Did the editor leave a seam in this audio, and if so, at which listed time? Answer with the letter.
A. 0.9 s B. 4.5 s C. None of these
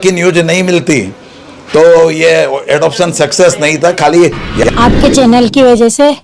B